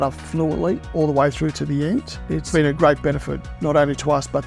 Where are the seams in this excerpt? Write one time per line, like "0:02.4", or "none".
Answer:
0:00.8
0:02.4